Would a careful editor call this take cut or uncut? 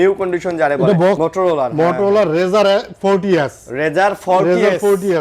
cut